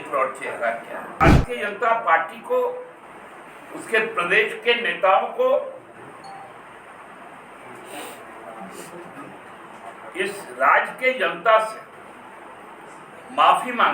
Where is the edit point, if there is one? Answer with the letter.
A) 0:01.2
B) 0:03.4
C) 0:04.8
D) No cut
A